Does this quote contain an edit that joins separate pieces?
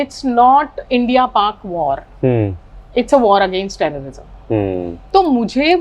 no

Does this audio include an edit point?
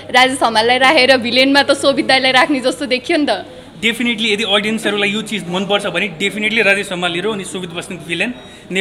no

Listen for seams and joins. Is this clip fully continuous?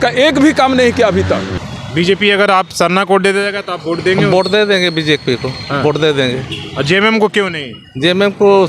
no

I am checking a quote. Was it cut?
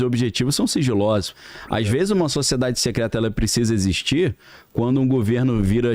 yes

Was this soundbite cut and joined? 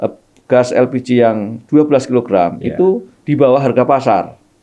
no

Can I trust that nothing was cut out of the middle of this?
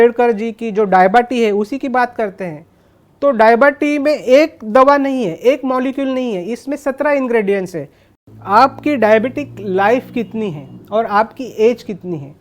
no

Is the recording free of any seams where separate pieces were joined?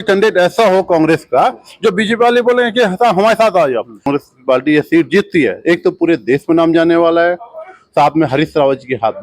no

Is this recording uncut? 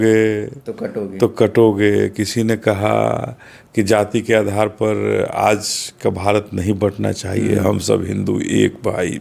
yes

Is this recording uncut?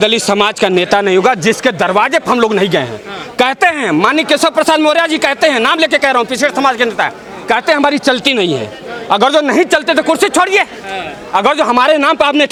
yes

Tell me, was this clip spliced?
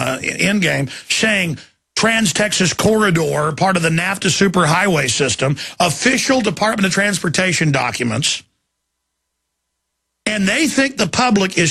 no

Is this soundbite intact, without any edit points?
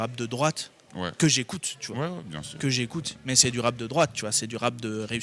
yes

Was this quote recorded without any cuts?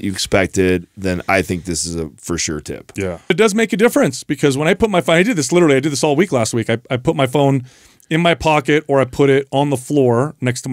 no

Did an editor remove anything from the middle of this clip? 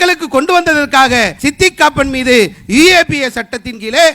yes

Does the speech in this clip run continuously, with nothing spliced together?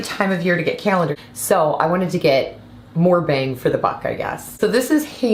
no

